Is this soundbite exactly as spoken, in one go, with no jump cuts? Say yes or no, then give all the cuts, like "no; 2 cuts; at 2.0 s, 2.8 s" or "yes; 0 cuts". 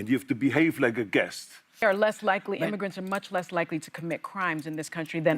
no; 1 cut; at 1.8 s